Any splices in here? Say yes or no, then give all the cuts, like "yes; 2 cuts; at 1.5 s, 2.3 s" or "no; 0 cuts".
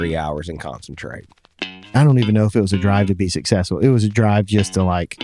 yes; 1 cut; at 1.8 s